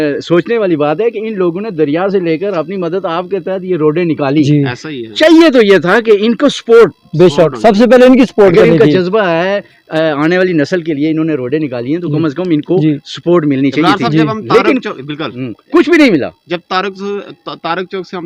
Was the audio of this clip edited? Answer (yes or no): no